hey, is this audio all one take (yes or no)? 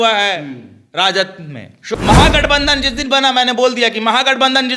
no